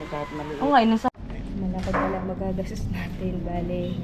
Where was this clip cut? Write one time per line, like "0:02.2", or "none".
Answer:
0:01.1